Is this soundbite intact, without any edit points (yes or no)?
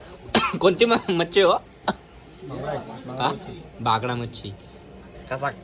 yes